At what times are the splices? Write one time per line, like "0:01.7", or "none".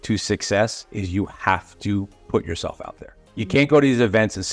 none